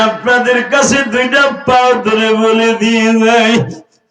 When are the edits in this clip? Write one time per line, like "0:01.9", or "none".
none